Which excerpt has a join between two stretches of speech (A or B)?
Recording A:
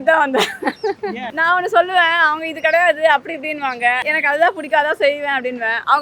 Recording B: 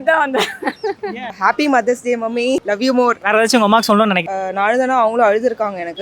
B